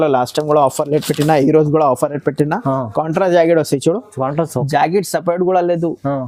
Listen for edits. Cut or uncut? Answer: uncut